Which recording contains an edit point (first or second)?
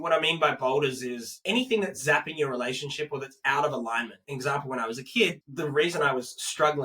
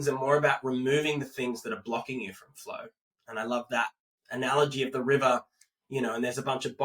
first